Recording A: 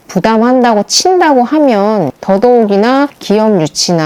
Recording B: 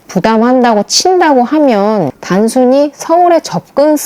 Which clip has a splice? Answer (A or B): B